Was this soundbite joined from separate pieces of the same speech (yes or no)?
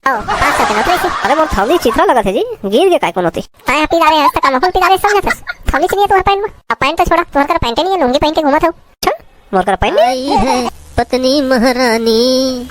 yes